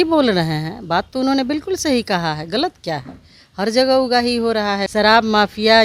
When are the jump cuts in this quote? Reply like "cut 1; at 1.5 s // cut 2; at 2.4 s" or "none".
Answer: cut 1; at 4.8 s